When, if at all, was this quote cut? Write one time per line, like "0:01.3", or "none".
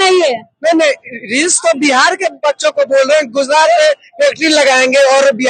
none